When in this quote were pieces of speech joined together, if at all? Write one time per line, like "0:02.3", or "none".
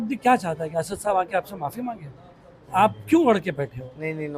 none